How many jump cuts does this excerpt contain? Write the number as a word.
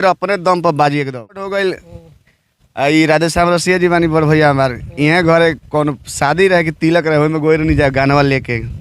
one